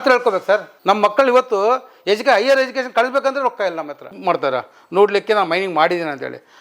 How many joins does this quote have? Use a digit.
1